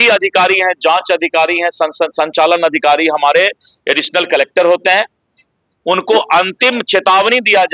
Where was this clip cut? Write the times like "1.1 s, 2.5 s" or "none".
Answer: none